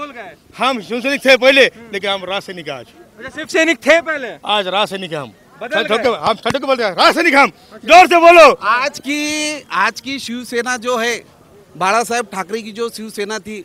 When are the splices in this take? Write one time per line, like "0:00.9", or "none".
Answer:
none